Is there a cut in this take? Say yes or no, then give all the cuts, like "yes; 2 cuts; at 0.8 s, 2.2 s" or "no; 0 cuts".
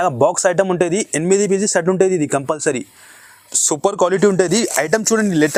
no; 0 cuts